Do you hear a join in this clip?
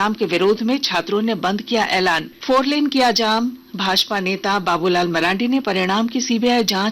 yes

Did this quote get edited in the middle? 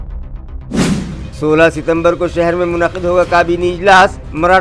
no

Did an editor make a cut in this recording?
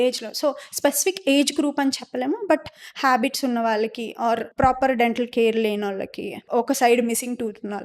yes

